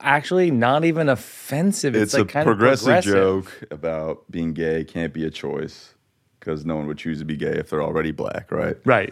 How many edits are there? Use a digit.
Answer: 1